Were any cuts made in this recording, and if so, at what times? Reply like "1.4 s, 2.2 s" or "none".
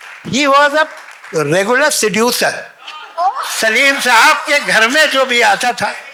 none